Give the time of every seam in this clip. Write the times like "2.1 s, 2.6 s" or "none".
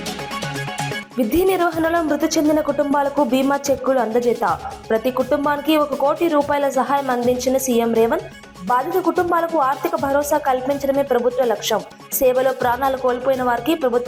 1.0 s